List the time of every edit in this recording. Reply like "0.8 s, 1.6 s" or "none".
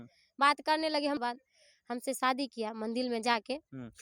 1.2 s